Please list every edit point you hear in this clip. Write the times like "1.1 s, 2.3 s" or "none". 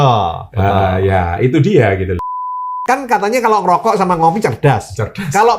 2.5 s